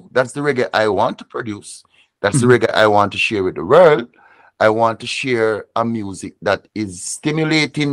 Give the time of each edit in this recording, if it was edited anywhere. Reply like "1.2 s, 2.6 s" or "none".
none

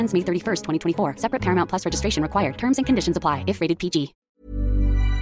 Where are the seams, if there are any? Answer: 4.2 s

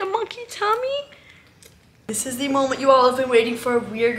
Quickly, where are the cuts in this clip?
2.1 s

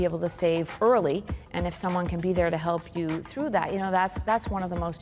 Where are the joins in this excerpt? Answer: none

